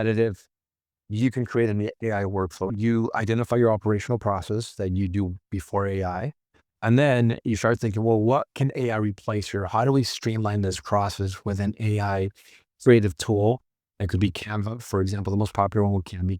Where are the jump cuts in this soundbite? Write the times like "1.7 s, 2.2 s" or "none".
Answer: 2.7 s